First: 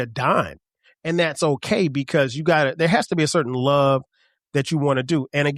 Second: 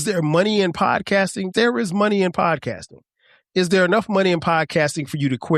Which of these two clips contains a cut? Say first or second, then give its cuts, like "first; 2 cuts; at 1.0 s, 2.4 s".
second; 1 cut; at 1.5 s